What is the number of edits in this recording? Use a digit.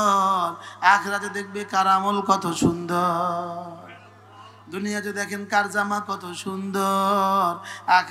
0